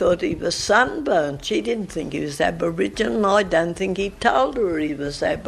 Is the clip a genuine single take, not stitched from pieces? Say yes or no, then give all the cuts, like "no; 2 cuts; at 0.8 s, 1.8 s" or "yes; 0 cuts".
yes; 0 cuts